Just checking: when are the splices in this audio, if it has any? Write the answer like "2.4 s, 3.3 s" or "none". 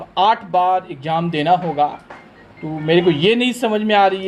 none